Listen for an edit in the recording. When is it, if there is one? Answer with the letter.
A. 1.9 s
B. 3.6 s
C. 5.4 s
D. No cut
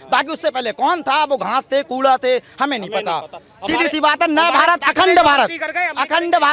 D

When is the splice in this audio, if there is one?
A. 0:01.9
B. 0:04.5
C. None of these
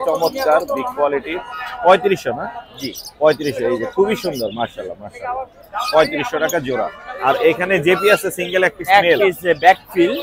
C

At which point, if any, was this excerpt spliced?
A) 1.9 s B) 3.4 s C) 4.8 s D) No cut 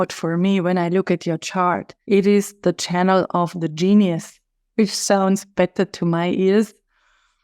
A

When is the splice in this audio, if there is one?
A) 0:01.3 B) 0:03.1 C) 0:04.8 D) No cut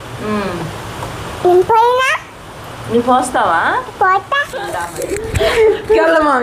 C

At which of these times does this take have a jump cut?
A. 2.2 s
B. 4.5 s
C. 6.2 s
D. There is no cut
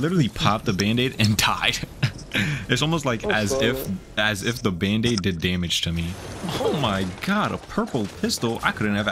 C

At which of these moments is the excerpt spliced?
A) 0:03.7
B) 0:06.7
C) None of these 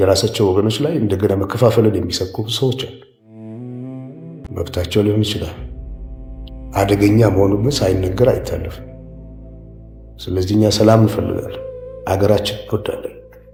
C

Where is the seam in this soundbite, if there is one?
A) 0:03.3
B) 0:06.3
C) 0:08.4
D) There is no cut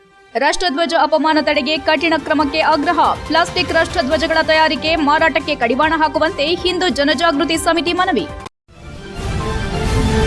C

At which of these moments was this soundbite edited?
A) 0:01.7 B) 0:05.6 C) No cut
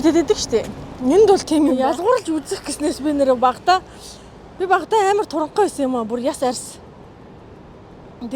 A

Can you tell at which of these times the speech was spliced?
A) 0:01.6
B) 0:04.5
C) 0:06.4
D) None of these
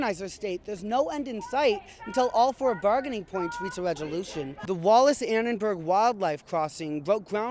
B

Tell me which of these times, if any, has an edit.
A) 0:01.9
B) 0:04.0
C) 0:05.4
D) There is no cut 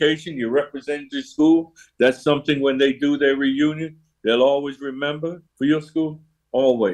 C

